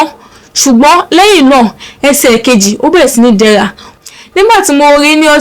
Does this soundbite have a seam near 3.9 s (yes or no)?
yes